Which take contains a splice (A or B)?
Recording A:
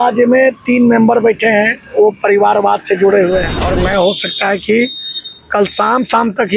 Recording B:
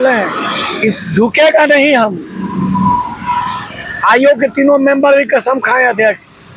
A